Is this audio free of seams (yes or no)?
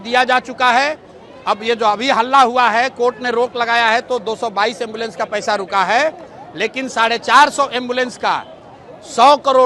yes